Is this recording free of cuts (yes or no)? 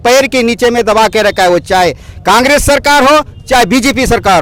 yes